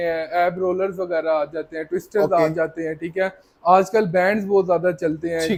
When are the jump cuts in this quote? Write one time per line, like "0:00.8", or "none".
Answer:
none